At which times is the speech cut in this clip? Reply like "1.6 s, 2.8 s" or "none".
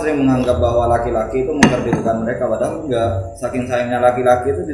none